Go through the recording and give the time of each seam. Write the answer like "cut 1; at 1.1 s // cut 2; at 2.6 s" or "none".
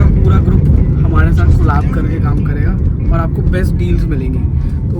none